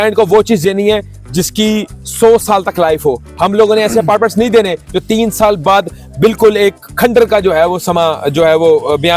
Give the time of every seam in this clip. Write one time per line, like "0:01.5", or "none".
none